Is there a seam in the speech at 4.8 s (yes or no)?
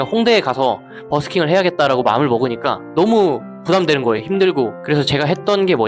yes